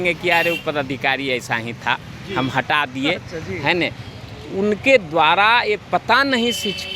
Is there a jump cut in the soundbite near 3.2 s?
no; 0 cuts

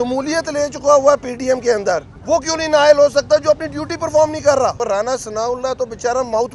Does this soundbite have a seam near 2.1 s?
yes; 2 cuts; at 2.1 s, 4.8 s

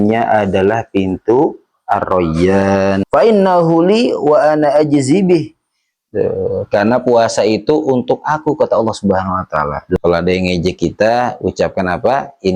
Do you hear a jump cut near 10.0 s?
yes; 2 cuts; at 3.1 s, 10.0 s

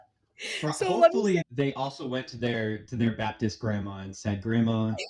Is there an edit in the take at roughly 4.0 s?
no; 1 cut; at 1.4 s

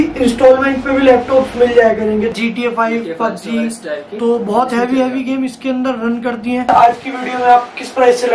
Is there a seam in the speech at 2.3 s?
yes; 2 cuts; at 2.3 s, 6.7 s

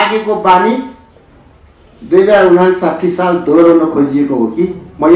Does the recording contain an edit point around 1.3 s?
no; 0 cuts

